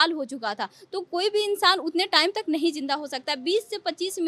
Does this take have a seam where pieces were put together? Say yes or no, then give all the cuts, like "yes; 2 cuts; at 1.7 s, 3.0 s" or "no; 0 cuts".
no; 0 cuts